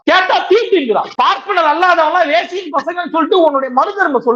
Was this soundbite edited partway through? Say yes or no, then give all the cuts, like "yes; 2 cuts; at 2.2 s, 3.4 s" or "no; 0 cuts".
yes; 1 cut; at 1.1 s